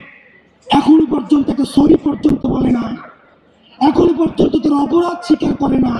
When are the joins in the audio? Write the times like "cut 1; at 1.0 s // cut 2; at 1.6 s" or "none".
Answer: none

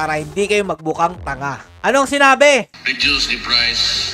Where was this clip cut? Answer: cut 1; at 1.6 s

